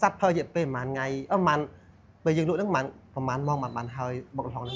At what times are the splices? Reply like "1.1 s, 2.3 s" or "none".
none